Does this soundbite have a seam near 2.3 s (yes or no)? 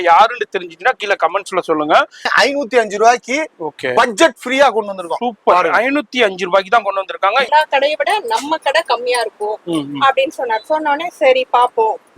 yes